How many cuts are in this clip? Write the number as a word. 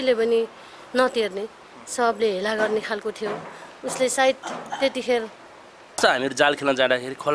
one